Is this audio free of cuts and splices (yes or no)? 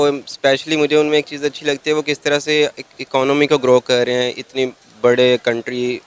yes